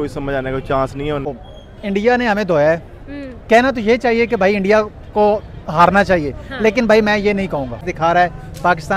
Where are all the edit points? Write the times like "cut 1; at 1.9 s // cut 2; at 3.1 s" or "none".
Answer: cut 1; at 1.4 s // cut 2; at 7.9 s

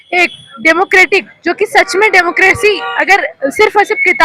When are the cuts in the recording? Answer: none

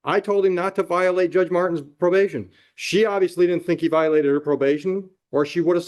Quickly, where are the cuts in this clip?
none

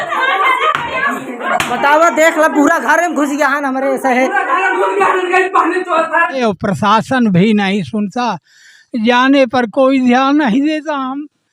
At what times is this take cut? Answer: cut 1; at 6.4 s

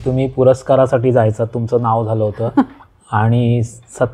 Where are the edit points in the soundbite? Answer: none

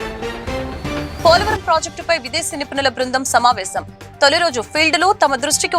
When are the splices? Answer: cut 1; at 1.1 s

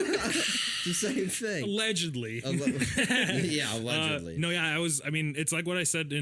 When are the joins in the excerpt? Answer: none

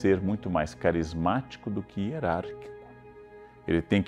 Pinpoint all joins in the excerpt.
none

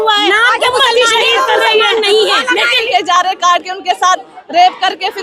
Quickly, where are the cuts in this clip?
cut 1; at 2.9 s

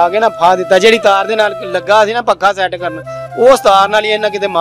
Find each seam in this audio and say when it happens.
none

